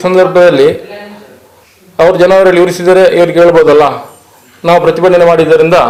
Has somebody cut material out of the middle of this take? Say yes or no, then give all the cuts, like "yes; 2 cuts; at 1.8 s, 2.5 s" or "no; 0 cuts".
no; 0 cuts